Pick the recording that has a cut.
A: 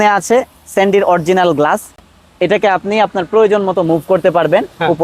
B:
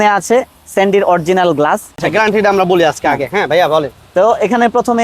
B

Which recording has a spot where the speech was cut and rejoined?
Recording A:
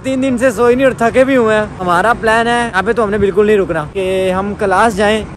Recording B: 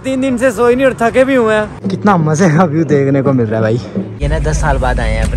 B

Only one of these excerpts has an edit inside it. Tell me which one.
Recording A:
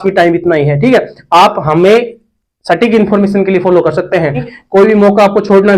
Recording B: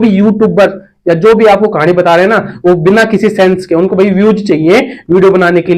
A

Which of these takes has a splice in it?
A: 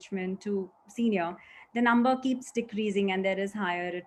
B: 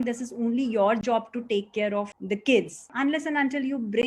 B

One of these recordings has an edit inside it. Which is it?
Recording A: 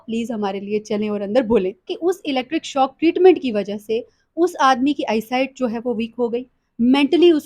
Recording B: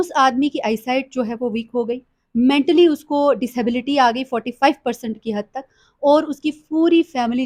A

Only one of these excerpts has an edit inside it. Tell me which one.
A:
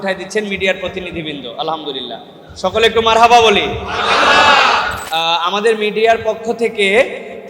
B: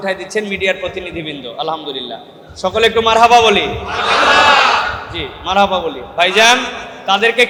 A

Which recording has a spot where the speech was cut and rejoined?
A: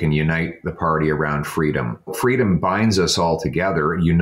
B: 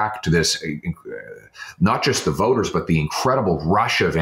A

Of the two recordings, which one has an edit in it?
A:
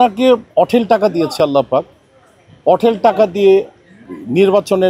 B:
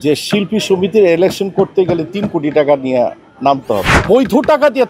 B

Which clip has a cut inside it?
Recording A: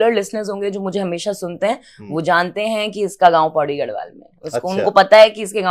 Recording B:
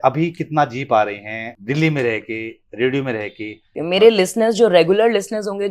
B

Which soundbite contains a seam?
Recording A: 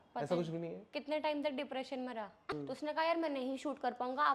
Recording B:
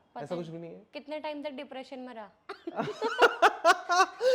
A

